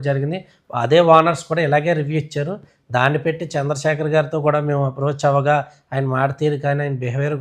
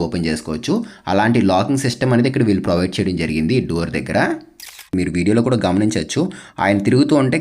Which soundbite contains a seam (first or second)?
second